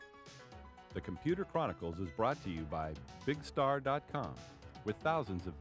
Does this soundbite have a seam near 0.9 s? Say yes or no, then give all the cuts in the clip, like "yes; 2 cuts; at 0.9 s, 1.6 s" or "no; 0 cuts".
yes; 1 cut; at 0.9 s